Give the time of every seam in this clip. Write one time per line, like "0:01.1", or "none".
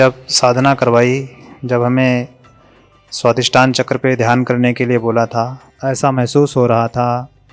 0:05.6